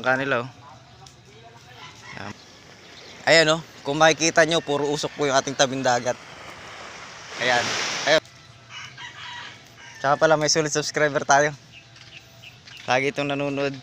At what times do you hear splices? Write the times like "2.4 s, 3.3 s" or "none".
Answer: 2.3 s, 8.2 s